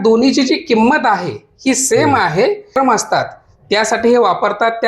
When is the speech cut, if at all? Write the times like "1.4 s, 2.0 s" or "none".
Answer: 2.7 s